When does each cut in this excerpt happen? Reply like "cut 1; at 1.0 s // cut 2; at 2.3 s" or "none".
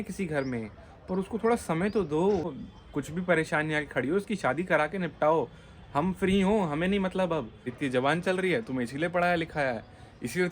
cut 1; at 2.5 s // cut 2; at 7.7 s